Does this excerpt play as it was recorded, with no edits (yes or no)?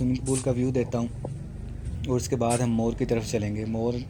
yes